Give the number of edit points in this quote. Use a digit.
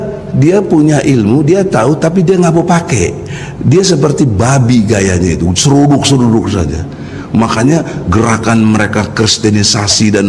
1